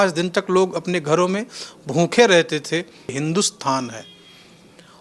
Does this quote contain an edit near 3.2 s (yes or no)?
yes